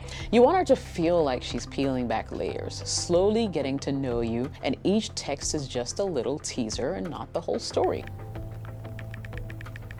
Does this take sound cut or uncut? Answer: uncut